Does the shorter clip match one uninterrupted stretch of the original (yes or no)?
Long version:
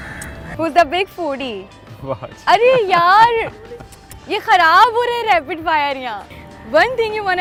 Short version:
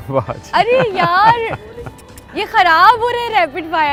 yes